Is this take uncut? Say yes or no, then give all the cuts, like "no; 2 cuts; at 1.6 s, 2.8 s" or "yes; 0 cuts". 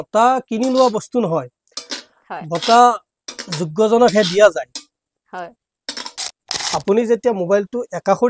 no; 1 cut; at 6.5 s